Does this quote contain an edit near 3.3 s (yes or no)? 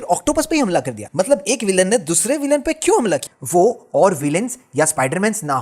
yes